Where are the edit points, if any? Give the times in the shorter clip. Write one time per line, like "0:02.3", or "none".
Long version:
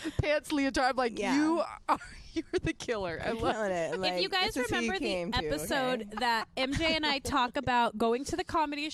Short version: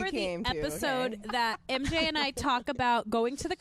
none